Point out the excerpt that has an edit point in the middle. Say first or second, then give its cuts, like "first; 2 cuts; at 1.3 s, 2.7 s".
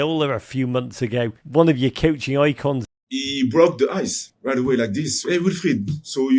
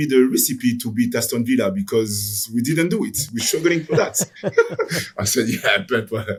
first; 4 cuts; at 1.4 s, 2.8 s, 4.3 s, 5.1 s